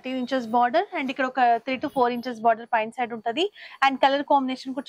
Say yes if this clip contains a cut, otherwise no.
no